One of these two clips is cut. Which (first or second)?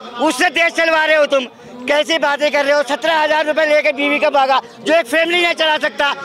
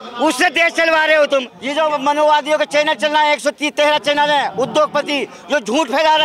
second